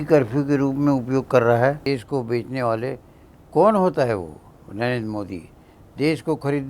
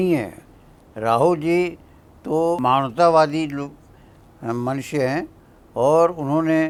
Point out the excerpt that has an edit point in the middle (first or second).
first